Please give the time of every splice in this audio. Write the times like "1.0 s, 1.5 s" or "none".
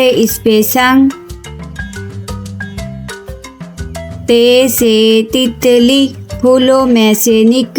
none